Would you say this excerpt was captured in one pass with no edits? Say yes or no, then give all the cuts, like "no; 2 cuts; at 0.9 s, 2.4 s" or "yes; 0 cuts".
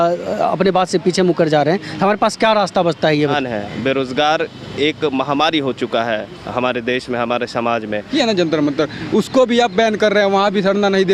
no; 2 cuts; at 3.3 s, 8.1 s